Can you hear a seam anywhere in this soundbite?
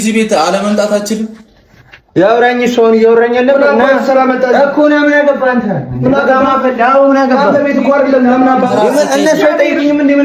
no; 0 cuts

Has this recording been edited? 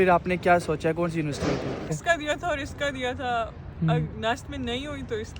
yes; 1 cut; at 1.9 s

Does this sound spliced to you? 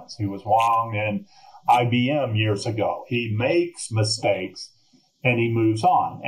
no; 0 cuts

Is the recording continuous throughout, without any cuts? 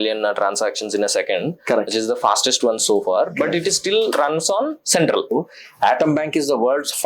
no; 1 cut; at 5.3 s

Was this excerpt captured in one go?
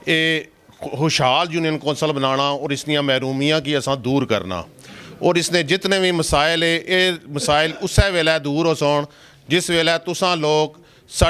yes; 0 cuts

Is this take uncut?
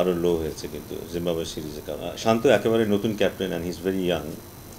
no; 1 cut; at 2.1 s

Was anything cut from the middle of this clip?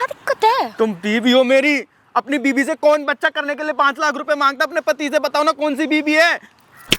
no; 0 cuts

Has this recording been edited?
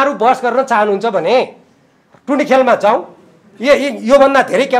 no; 0 cuts

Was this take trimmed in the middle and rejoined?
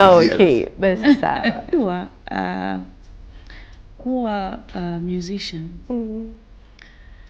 yes; 1 cut; at 1.7 s

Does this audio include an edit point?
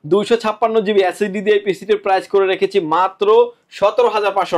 no; 0 cuts

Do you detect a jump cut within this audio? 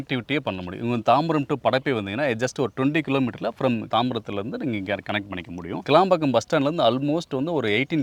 yes; 1 cut; at 3.9 s

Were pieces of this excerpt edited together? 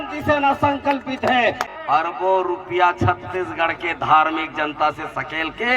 yes; 1 cut; at 1.7 s

